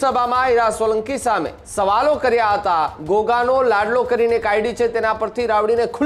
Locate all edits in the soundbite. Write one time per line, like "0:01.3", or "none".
0:01.6
0:03.0